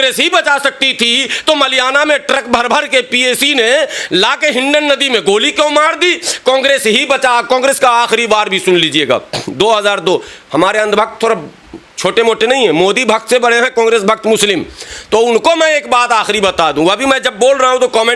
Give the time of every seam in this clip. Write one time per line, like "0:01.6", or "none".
none

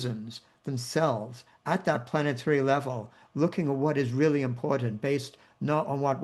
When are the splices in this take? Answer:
none

